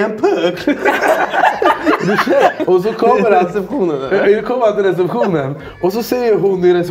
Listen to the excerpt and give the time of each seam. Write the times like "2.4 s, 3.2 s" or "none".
2.6 s